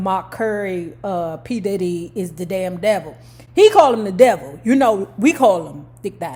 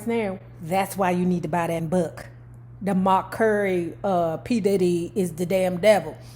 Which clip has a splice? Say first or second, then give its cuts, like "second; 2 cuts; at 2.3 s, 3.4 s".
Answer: second; 1 cut; at 1.9 s